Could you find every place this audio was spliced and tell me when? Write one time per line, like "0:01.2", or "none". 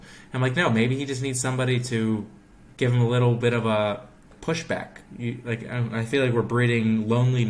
0:02.6
0:04.3
0:05.0